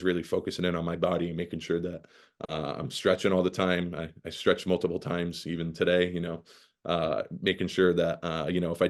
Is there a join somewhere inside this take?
no; 0 cuts

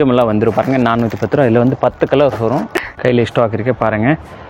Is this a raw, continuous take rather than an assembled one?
no; 1 cut; at 2.7 s

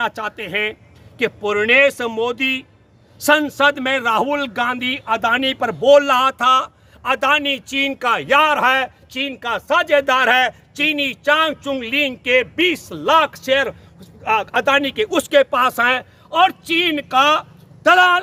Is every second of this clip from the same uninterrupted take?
yes; 0 cuts

